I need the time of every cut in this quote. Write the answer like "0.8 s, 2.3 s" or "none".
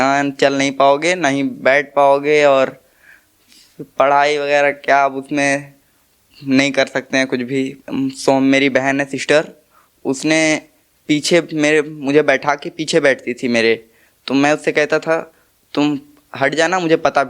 7.8 s